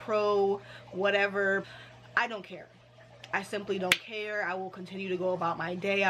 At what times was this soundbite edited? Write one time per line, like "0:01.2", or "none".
0:01.7